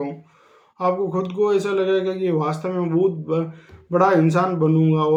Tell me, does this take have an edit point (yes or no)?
no